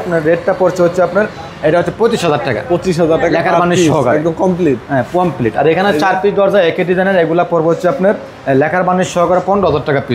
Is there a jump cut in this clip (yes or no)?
no